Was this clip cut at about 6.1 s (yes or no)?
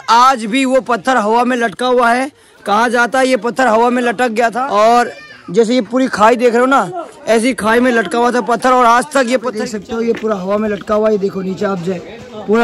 no